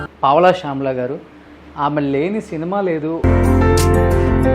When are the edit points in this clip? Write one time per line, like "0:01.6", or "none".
0:03.2